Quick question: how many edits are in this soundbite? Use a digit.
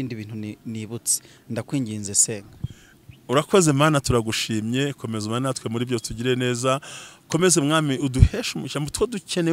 0